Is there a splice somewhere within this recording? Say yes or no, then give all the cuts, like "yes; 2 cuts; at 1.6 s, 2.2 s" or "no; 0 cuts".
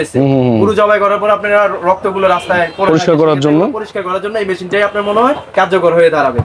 no; 0 cuts